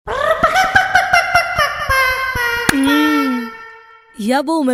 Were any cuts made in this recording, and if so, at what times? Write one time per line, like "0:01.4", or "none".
none